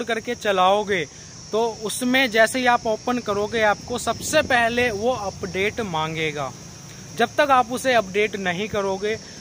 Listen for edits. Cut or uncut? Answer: uncut